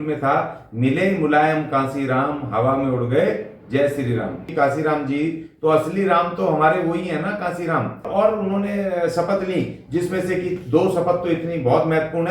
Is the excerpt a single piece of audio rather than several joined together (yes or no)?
no